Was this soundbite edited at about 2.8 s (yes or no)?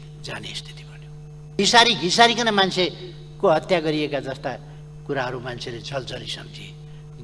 no